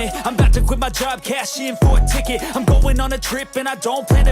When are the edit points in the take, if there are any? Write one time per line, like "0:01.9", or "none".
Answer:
0:03.0